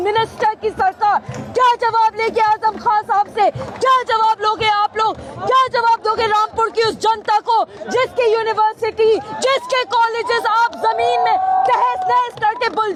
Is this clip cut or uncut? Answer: uncut